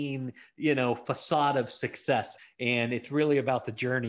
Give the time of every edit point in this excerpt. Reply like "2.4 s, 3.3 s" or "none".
2.4 s